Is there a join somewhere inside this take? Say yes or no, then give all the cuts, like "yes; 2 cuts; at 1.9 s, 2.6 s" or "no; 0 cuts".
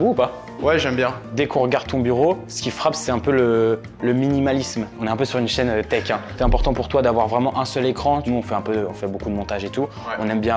no; 0 cuts